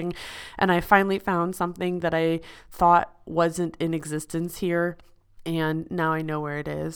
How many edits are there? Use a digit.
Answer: 0